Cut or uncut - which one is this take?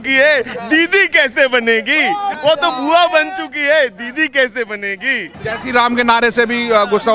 cut